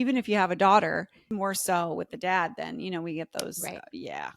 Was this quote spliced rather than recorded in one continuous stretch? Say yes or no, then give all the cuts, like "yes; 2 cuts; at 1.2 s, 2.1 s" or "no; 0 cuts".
yes; 1 cut; at 1.2 s